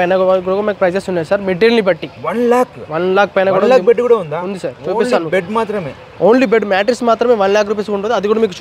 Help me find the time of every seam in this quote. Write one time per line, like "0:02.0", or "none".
none